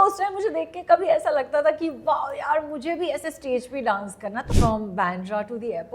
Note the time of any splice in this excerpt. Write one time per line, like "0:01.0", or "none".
0:04.5